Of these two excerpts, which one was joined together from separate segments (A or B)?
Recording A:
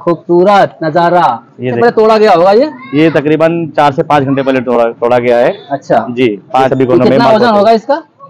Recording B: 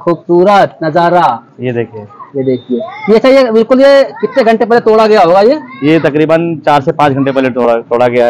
A